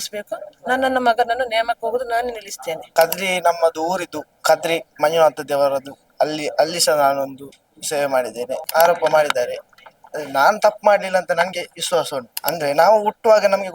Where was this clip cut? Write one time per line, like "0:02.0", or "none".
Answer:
0:02.8
0:08.5
0:12.3